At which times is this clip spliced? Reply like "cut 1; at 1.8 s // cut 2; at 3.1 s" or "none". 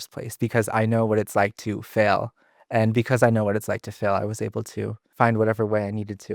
cut 1; at 5.0 s